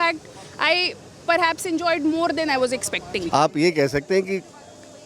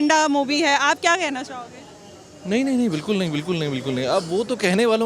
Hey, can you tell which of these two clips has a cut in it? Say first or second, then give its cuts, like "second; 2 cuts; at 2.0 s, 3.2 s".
first; 1 cut; at 3.2 s